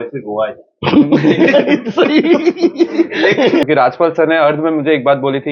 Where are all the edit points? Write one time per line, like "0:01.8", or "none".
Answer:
0:03.6

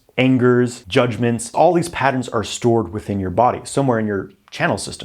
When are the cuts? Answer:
0:01.5

